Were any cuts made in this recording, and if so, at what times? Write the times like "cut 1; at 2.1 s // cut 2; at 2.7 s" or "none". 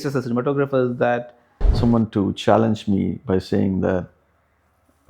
cut 1; at 1.8 s